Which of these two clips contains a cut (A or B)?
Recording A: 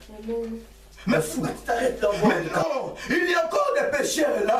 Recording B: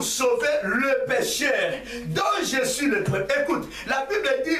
A